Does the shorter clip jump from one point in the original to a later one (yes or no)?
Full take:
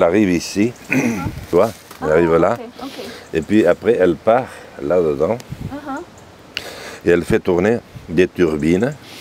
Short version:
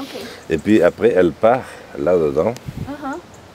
no